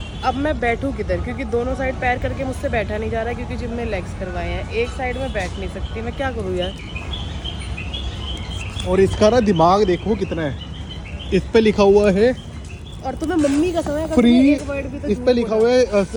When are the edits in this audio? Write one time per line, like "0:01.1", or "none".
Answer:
none